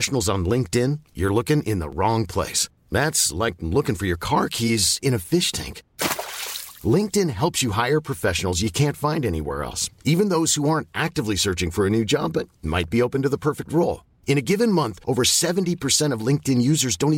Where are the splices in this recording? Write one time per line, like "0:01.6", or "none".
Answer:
none